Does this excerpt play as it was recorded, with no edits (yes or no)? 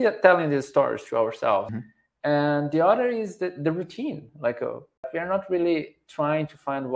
no